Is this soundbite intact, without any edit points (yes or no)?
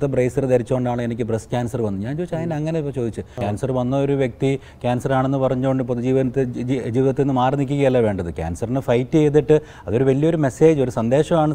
no